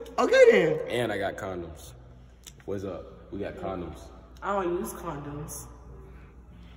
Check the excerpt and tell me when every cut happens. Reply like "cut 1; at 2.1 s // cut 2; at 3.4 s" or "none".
none